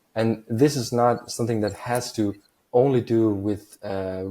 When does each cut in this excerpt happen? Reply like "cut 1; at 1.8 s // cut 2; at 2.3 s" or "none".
cut 1; at 2.5 s